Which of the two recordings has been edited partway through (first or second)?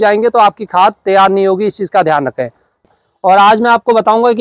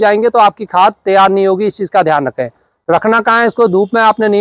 first